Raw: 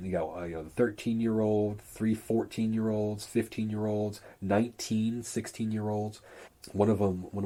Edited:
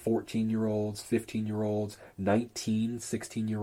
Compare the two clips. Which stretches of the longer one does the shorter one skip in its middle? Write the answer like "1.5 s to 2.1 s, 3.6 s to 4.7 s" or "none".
none